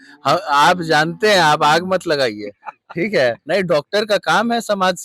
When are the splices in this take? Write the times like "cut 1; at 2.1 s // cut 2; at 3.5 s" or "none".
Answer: cut 1; at 3.4 s